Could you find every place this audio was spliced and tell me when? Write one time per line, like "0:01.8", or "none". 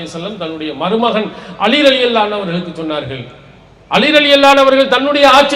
none